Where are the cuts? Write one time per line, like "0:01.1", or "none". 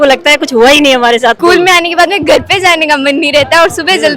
0:01.4